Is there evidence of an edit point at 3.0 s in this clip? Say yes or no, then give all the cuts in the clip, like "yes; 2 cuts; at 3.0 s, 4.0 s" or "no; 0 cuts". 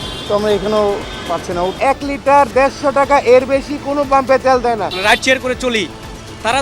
no; 2 cuts; at 1.8 s, 4.9 s